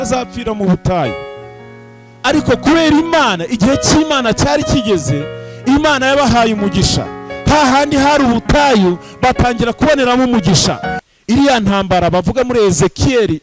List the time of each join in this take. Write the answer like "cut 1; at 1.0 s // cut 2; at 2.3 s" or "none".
cut 1; at 10.9 s